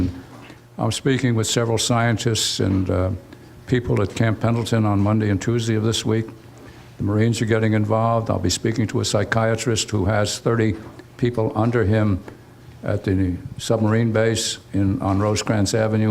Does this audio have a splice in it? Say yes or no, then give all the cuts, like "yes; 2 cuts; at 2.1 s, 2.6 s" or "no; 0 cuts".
yes; 1 cut; at 14.7 s